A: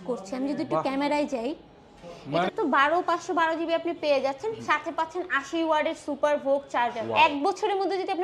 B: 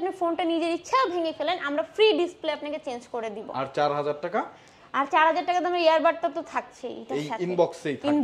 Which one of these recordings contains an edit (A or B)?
A